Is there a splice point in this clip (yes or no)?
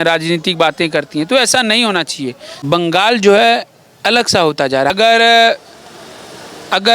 yes